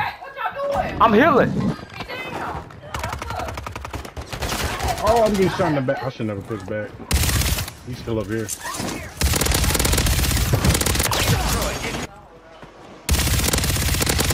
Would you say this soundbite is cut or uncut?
cut